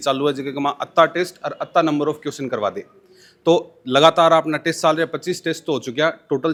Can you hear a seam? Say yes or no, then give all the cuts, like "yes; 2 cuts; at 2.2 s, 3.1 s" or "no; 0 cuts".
no; 0 cuts